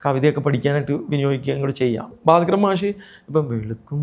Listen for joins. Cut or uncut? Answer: cut